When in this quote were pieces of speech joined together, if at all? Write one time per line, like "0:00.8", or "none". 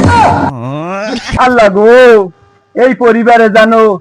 0:01.2